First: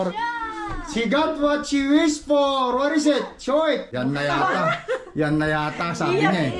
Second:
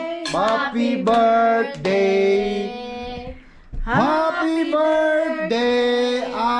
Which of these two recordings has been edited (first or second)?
first